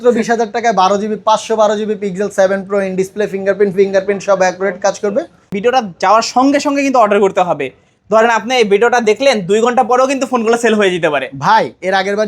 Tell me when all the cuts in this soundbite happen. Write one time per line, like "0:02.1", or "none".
0:05.5